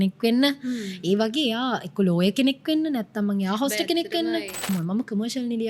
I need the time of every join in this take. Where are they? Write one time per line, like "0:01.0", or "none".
0:04.7